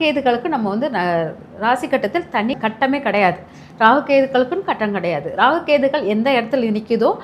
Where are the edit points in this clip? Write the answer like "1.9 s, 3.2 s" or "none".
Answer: none